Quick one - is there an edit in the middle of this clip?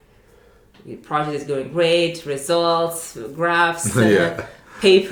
no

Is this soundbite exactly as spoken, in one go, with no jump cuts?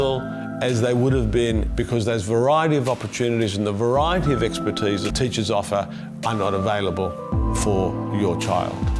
no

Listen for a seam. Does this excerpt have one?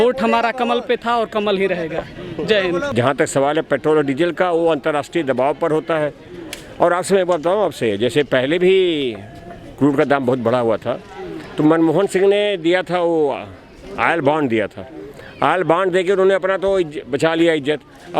yes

